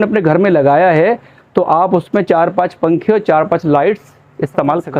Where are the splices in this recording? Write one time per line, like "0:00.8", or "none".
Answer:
none